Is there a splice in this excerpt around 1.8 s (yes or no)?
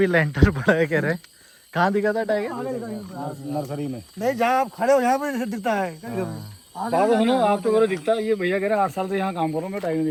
no